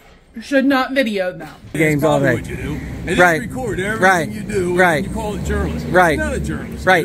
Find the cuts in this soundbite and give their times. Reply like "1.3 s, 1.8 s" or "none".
1.8 s